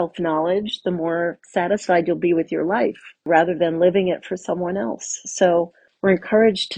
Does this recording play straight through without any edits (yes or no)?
no